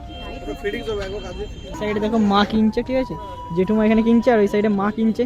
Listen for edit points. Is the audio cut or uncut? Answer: cut